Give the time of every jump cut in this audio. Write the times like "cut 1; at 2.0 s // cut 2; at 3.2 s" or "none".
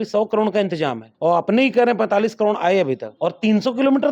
cut 1; at 1.1 s // cut 2; at 3.1 s